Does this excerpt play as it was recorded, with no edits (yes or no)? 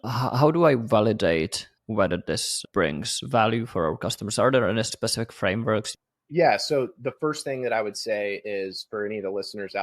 no